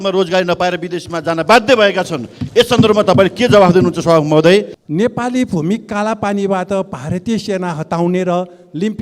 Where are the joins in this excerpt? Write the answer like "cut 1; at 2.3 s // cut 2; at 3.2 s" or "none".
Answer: cut 1; at 4.8 s